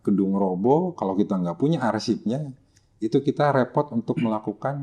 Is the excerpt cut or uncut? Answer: uncut